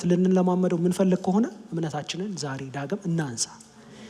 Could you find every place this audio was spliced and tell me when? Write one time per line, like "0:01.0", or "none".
none